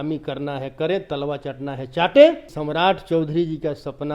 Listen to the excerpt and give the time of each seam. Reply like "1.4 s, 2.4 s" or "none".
2.6 s